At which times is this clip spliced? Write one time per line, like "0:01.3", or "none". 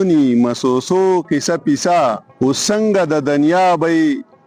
0:02.3